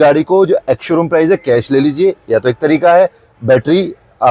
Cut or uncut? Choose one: uncut